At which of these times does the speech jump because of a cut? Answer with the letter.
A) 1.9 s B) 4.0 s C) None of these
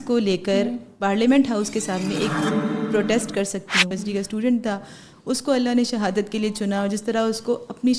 B